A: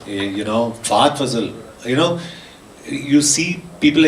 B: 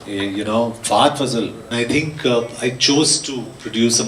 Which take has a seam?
B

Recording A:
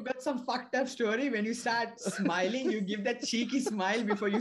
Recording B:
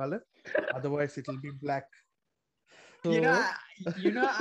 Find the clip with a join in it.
B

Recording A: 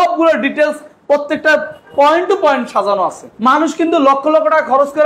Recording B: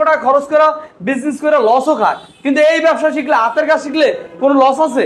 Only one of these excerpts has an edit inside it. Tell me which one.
A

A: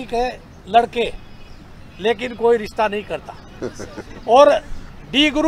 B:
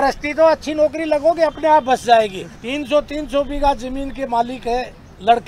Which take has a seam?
B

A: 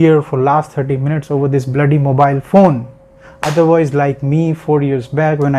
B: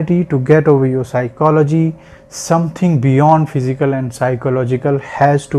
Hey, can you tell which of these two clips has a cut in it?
A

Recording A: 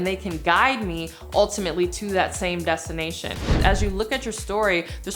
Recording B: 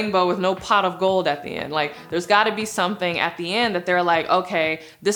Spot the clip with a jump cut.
A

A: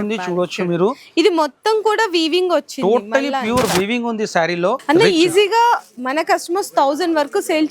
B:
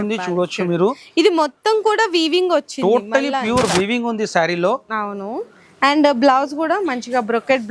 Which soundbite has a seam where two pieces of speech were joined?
A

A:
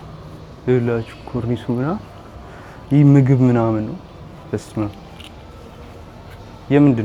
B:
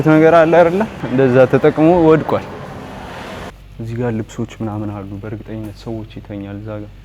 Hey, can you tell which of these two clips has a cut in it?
B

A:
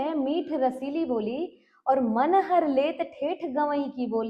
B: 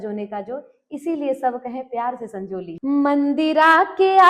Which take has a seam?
B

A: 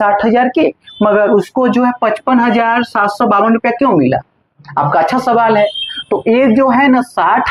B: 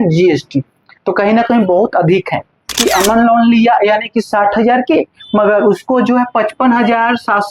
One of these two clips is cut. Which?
B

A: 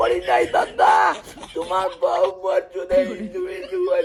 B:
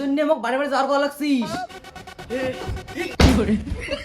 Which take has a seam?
B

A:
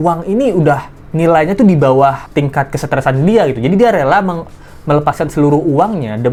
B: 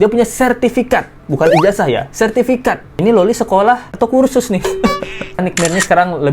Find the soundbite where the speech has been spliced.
B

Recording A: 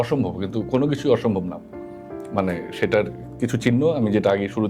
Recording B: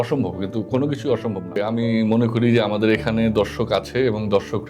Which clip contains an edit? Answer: B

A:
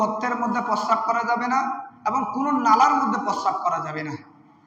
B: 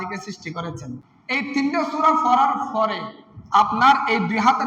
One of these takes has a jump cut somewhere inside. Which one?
B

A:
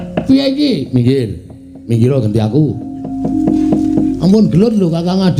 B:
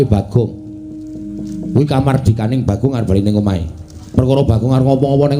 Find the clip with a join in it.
A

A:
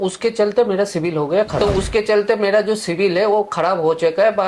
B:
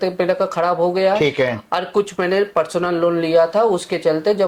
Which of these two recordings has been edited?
A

